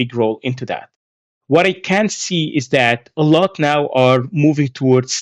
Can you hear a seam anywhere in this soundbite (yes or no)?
no